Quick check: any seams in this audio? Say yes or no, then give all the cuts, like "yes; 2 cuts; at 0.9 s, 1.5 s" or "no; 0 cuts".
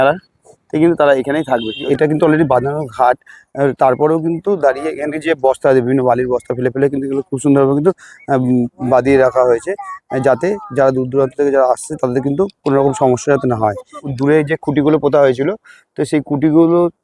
yes; 2 cuts; at 1.9 s, 14.1 s